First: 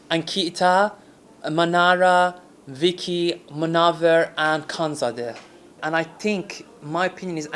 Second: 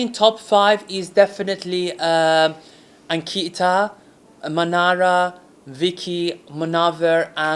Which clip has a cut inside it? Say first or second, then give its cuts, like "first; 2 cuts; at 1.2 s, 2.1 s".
first; 1 cut; at 5.8 s